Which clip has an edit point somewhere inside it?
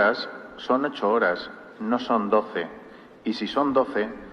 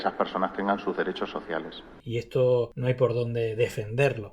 second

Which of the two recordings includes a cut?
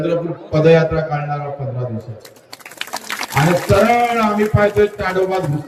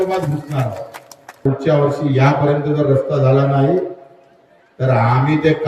second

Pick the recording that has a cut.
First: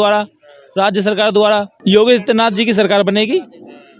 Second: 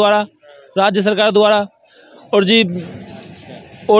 first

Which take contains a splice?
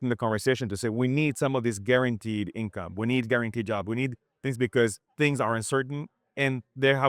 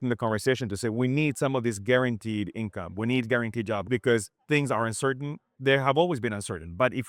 second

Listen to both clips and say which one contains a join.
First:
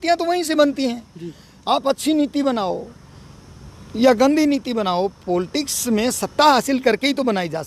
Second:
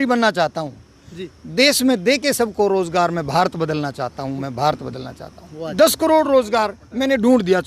second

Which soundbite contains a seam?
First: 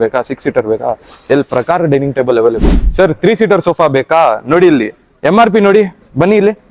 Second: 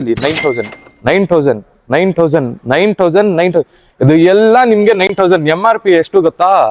first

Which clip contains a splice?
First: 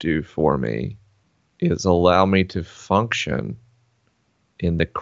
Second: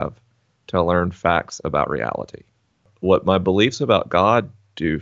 second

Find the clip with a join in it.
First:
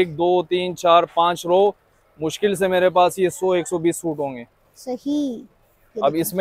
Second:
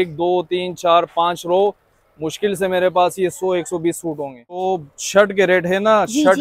second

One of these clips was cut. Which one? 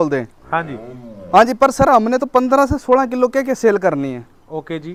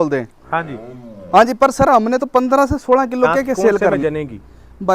second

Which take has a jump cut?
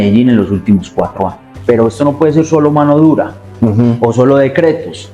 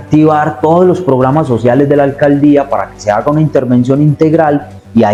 first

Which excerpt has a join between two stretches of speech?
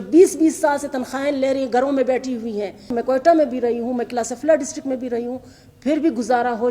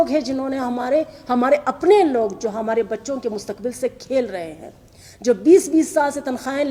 first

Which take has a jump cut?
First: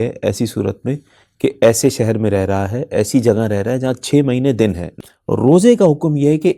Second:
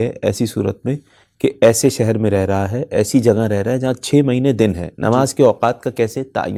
first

